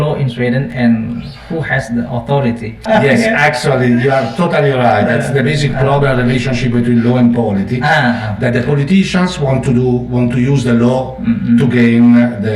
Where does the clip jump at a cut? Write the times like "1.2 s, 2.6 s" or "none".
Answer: 2.8 s